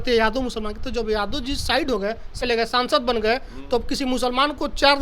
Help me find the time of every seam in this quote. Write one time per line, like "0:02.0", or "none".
0:02.4